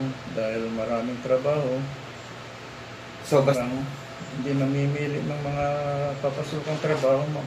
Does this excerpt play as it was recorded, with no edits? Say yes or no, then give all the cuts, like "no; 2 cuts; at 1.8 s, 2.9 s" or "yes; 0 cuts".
no; 1 cut; at 3.6 s